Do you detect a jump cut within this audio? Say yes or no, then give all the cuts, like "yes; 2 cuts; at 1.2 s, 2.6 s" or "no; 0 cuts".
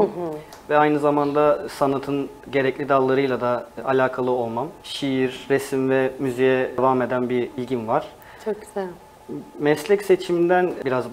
no; 0 cuts